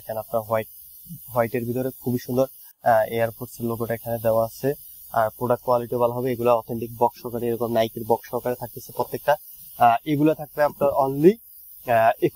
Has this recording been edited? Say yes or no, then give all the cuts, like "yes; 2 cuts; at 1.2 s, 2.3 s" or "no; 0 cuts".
no; 0 cuts